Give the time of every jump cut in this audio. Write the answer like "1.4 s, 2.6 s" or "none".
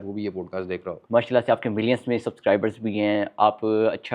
0.9 s